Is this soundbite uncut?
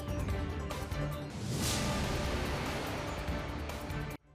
no; 1 cut; at 1.3 s

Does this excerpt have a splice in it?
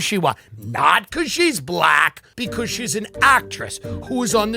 yes; 1 cut; at 2.3 s

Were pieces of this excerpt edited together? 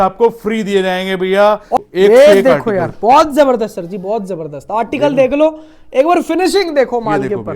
yes; 1 cut; at 1.8 s

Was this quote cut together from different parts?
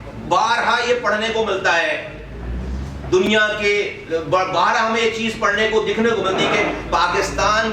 no; 0 cuts

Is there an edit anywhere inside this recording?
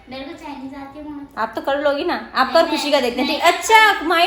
no; 0 cuts

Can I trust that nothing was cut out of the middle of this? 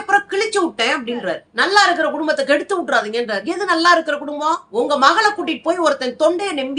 no; 2 cuts; at 1.4 s, 4.7 s

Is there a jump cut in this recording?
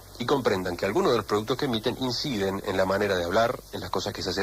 yes; 1 cut; at 1.0 s

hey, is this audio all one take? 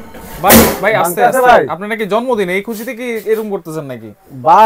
yes; 0 cuts

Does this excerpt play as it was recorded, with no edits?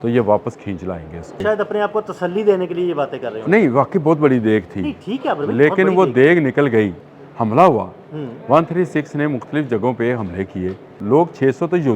no; 3 cuts; at 1.4 s, 7.0 s, 11.0 s

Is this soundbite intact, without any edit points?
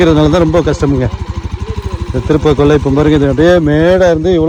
yes; 0 cuts

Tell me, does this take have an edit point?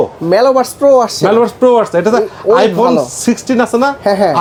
no; 0 cuts

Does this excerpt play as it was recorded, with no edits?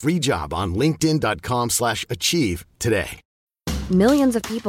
no; 1 cut; at 3.2 s

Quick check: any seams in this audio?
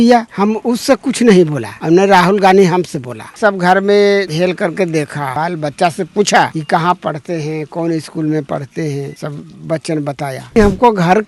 yes; 4 cuts; at 1.7 s, 3.4 s, 9.1 s, 10.6 s

